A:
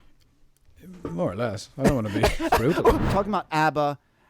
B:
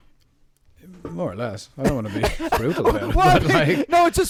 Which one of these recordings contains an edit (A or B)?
A